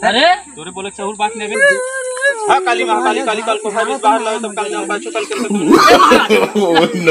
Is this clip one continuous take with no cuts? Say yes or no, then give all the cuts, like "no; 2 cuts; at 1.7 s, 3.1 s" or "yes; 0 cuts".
no; 1 cut; at 1.5 s